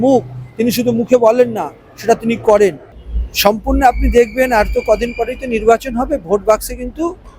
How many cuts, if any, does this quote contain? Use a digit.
1